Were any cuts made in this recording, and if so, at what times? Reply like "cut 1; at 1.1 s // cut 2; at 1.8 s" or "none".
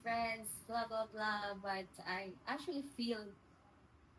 none

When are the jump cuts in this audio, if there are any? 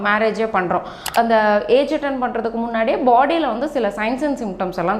cut 1; at 1.1 s

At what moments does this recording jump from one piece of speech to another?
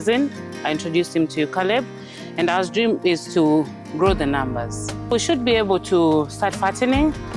cut 1; at 5.1 s

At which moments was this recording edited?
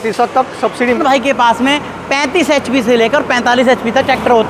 cut 1; at 1.0 s

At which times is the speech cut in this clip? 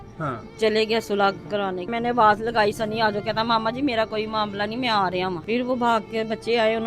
cut 1; at 1.9 s // cut 2; at 5.4 s

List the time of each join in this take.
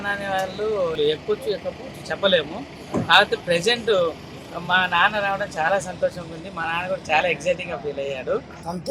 cut 1; at 1.0 s

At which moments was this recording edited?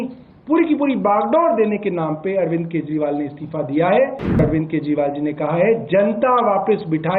cut 1; at 4.4 s

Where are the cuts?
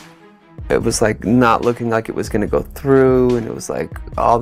none

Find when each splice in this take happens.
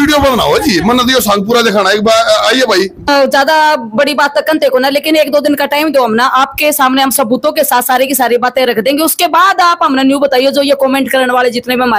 cut 1; at 3.1 s

